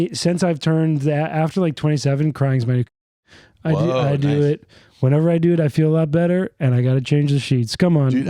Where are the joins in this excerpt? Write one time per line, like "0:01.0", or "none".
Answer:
none